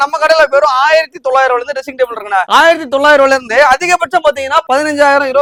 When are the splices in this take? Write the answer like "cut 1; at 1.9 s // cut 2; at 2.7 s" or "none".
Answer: none